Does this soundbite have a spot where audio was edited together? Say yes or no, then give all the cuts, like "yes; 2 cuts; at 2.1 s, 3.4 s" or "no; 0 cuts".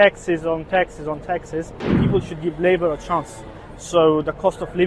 yes; 1 cut; at 2.0 s